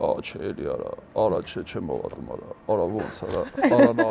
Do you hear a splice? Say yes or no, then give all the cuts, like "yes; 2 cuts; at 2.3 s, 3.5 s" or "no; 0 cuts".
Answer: no; 0 cuts